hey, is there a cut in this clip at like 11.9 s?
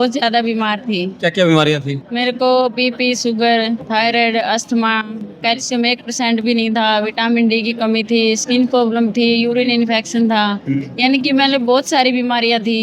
no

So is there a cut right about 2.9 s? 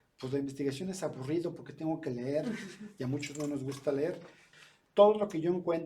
no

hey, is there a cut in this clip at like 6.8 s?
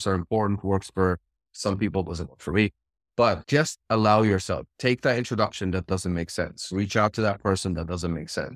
no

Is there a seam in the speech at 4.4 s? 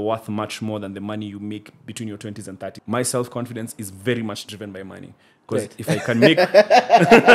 no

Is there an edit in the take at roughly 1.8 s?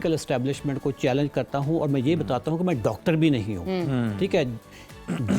no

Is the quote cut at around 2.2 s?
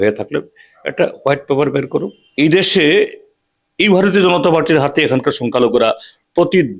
yes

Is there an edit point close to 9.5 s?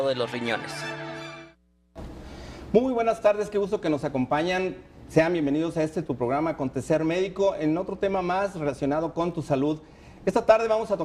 yes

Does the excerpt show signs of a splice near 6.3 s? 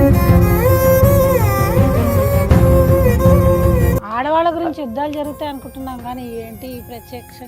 no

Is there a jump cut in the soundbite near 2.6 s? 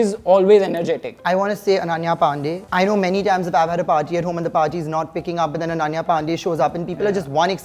yes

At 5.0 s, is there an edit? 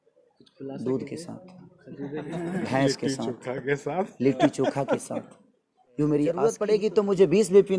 no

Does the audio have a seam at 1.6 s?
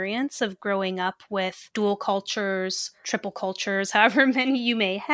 yes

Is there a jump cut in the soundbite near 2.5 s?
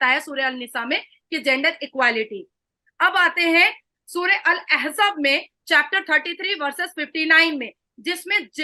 no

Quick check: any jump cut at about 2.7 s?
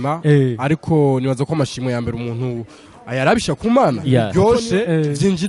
no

